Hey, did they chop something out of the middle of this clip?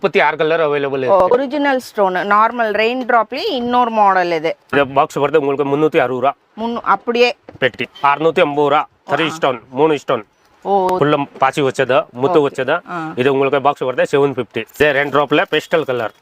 yes; 5 cuts; at 1.3 s, 4.7 s, 7.9 s, 10.9 s, 14.6 s

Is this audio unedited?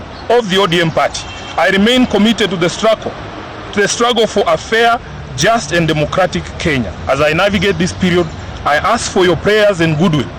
yes; 0 cuts

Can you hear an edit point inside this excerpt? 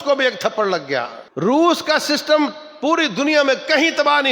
yes; 1 cut; at 1.2 s

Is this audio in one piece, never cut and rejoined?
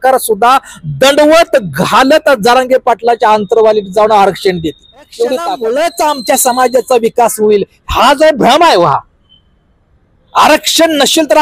no; 1 cut; at 5.5 s

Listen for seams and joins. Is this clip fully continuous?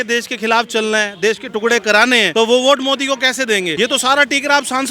no; 2 cuts; at 2.3 s, 3.7 s

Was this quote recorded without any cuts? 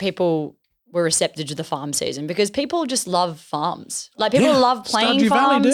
yes; 0 cuts

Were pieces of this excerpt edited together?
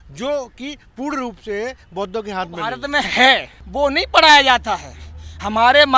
yes; 2 cuts; at 2.8 s, 3.6 s

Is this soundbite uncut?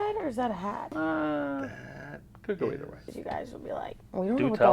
no; 2 cuts; at 0.8 s, 3.1 s

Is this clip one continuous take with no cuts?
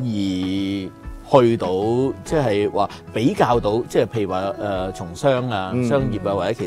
yes; 0 cuts

